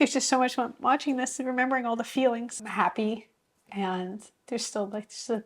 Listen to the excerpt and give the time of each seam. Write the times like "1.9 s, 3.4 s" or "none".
2.6 s